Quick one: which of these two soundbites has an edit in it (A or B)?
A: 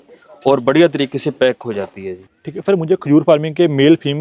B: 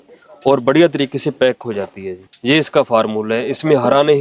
A